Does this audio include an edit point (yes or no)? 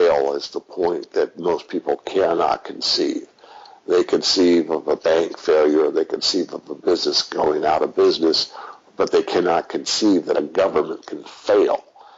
no